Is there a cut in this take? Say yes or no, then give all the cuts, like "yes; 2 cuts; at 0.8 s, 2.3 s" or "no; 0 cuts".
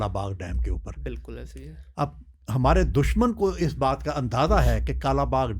no; 0 cuts